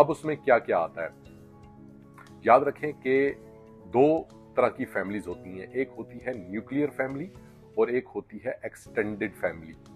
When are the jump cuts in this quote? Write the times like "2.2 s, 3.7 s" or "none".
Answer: none